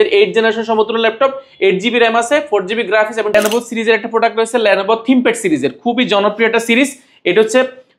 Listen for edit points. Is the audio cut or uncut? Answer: cut